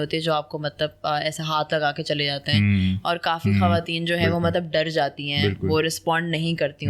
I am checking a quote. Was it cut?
no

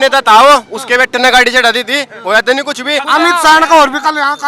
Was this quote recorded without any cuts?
no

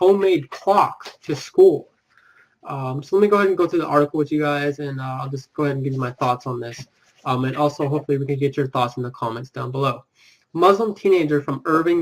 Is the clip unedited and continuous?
no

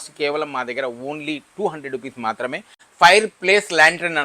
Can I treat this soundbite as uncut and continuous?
no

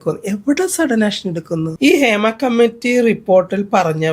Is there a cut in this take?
yes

